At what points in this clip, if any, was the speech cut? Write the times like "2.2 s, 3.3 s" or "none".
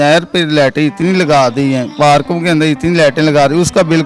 none